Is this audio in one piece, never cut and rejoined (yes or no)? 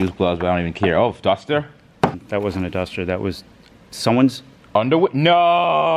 no